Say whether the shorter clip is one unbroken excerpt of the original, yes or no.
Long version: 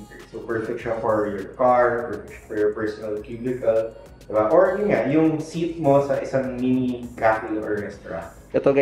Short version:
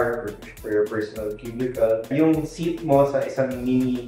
no